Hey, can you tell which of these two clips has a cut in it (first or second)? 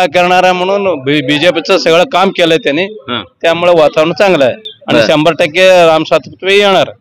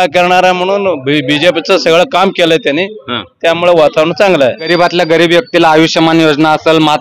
second